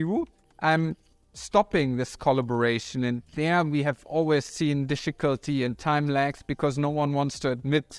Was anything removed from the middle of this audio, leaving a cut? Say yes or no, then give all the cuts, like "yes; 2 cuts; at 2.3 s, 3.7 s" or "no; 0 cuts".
no; 0 cuts